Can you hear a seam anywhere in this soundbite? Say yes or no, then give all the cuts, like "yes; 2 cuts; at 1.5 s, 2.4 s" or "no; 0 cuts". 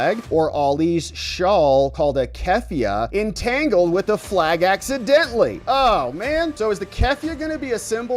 no; 0 cuts